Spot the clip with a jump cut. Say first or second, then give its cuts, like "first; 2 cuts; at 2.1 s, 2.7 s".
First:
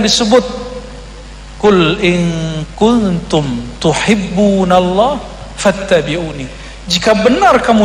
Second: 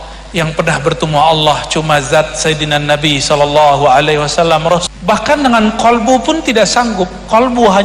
second; 1 cut; at 4.8 s